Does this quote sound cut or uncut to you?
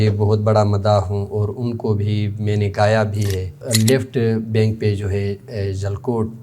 cut